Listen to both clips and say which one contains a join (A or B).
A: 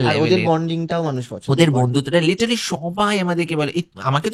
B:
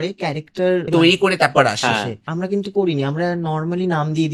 B